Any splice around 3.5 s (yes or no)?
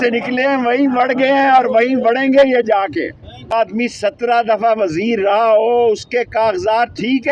yes